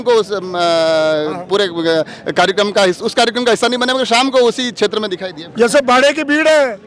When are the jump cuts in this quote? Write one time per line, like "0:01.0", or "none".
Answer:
0:05.4